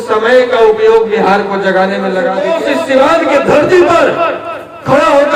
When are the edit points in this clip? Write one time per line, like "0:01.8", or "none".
0:02.3